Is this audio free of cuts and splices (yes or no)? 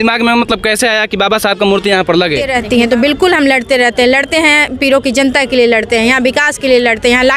no